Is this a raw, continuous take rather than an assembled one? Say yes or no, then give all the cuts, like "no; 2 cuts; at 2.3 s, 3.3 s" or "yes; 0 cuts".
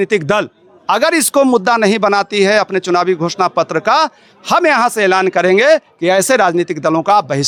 yes; 0 cuts